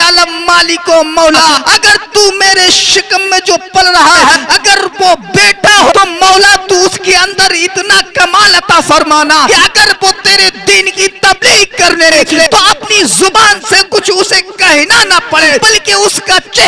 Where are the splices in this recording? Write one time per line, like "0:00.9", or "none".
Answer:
0:01.6
0:04.4
0:12.1
0:15.6